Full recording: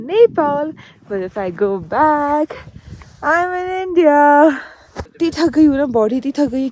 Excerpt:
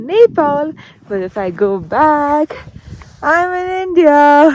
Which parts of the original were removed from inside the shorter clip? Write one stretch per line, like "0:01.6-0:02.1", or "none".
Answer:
none